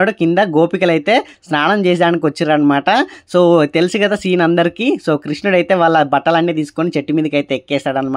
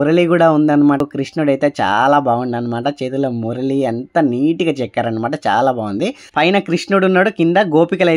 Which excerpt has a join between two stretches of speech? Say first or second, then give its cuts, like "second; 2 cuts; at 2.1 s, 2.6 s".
second; 2 cuts; at 1.0 s, 6.2 s